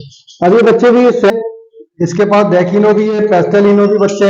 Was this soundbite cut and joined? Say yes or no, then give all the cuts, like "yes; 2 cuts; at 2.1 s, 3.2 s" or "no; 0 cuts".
yes; 1 cut; at 1.3 s